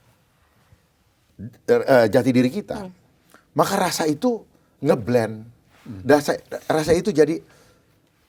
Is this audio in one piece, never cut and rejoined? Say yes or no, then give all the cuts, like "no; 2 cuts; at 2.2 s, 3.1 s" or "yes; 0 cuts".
yes; 0 cuts